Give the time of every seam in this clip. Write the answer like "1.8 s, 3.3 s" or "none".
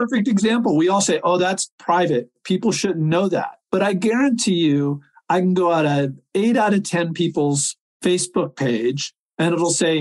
3.6 s